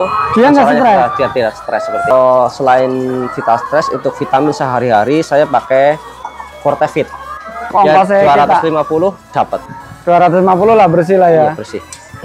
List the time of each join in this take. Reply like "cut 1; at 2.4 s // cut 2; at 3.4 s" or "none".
cut 1; at 2.1 s // cut 2; at 7.7 s